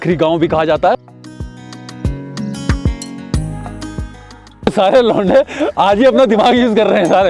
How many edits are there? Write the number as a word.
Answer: two